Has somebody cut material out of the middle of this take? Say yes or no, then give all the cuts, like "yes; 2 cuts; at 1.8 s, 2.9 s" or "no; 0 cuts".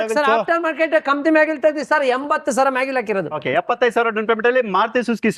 yes; 1 cut; at 3.4 s